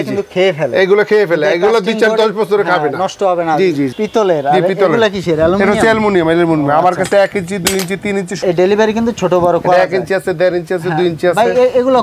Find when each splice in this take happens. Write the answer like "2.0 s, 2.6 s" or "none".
3.9 s, 8.4 s